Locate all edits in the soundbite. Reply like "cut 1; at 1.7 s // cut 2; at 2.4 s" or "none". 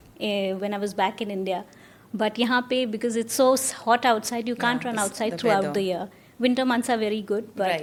none